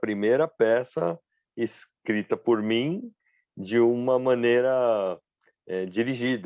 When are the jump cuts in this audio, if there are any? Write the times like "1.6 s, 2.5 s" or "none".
none